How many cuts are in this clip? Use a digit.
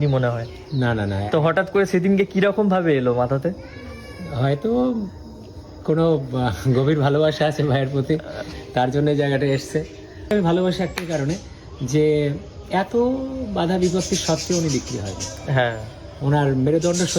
1